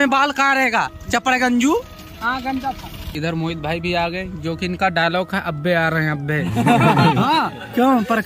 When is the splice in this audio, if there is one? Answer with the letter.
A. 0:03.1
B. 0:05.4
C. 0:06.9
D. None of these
A